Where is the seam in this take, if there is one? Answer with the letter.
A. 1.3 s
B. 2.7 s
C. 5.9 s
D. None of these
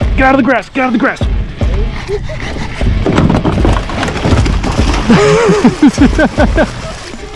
B